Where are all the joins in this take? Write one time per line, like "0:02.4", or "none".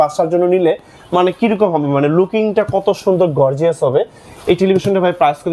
none